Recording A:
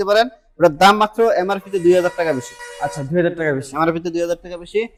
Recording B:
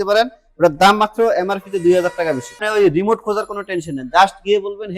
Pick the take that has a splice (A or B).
B